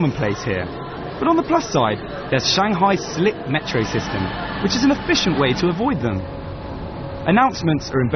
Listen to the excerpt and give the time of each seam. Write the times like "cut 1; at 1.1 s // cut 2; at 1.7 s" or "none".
cut 1; at 6.9 s